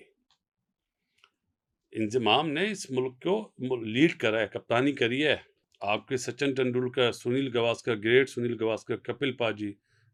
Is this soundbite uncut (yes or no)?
yes